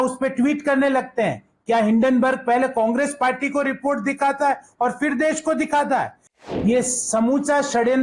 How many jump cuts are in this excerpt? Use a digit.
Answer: 1